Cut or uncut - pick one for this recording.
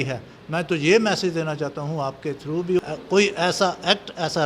cut